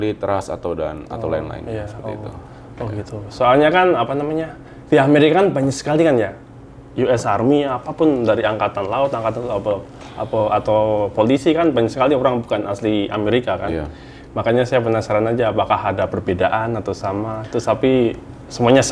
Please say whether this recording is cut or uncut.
uncut